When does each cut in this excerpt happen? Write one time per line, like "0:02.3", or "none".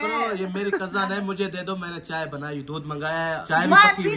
none